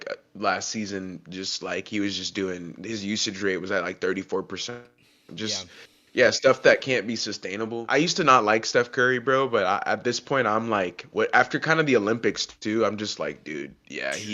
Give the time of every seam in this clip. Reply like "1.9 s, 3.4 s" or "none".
7.8 s